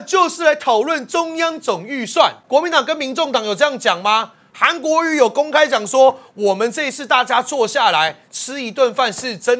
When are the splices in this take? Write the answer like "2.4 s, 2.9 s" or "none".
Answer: 2.4 s

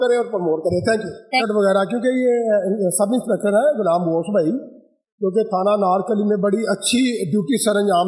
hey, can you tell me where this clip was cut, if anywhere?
1.4 s

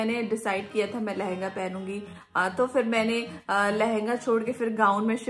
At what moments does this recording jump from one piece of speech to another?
none

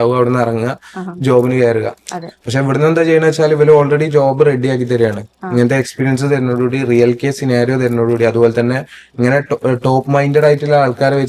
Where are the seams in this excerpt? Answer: none

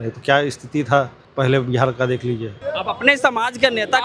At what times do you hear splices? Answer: 1.2 s, 2.6 s

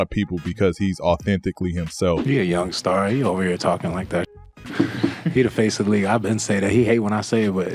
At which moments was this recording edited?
none

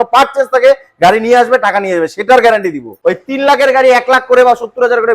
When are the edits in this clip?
2.9 s

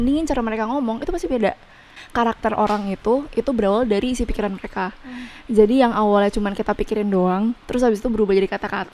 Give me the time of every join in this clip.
1.9 s

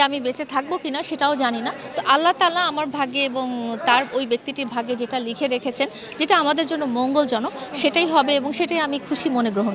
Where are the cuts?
none

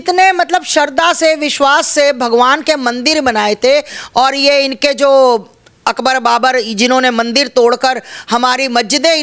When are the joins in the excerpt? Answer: none

